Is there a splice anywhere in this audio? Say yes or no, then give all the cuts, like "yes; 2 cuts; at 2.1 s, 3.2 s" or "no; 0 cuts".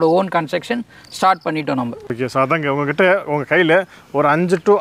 yes; 1 cut; at 2.1 s